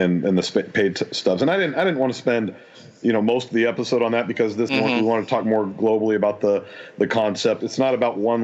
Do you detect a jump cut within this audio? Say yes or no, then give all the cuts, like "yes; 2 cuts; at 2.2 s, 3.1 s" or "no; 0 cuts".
yes; 2 cuts; at 4.7 s, 7.6 s